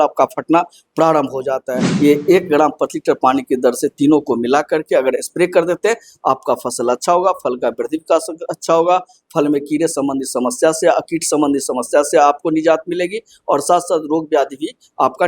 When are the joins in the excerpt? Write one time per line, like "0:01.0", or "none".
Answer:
0:01.8